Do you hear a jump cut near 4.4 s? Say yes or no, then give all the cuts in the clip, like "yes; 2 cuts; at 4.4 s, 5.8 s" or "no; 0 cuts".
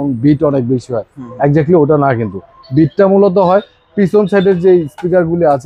no; 0 cuts